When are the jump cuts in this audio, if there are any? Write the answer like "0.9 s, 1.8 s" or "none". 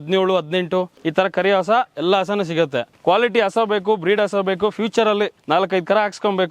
1.0 s, 2.9 s, 5.4 s